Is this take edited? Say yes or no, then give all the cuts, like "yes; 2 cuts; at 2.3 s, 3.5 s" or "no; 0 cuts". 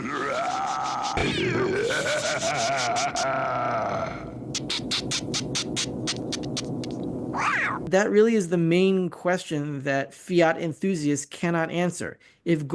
yes; 2 cuts; at 1.2 s, 7.8 s